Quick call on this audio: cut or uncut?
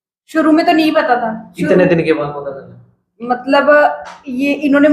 uncut